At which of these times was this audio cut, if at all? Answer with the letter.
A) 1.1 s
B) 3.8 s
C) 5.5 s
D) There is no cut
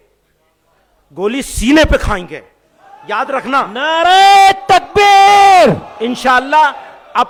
D